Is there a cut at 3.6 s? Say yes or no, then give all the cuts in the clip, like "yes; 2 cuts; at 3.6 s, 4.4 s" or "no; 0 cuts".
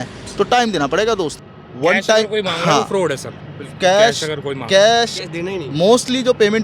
no; 1 cut; at 1.4 s